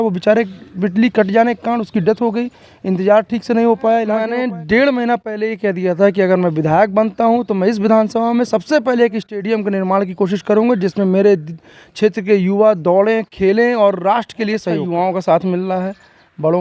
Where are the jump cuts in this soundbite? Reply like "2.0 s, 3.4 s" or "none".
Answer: 4.2 s, 14.8 s